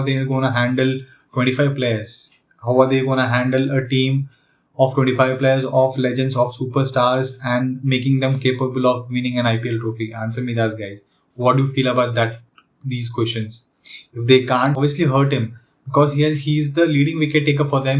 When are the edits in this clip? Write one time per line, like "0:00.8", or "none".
0:14.8

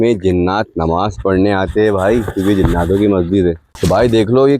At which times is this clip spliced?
0:03.7

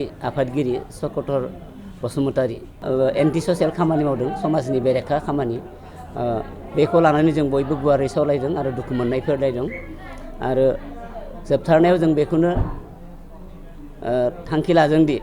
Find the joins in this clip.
0:02.7

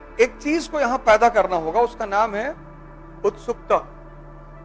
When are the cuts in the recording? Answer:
none

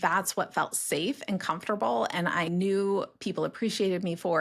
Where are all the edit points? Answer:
none

